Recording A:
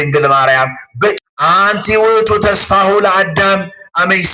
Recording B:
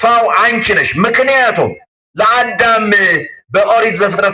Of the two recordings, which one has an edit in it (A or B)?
A